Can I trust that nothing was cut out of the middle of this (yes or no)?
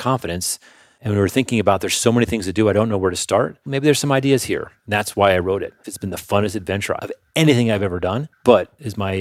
no